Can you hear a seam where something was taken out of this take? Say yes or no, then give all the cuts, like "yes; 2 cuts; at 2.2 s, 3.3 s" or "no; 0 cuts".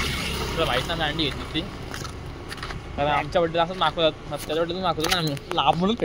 no; 0 cuts